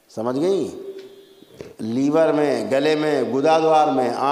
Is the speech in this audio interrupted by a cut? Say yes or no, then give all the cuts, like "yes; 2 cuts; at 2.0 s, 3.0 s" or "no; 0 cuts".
no; 0 cuts